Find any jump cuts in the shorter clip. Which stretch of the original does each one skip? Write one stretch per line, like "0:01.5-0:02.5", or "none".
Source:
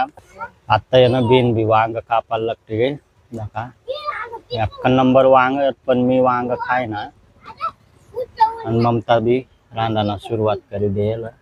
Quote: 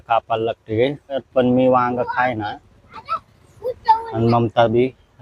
0:03.2-0:05.8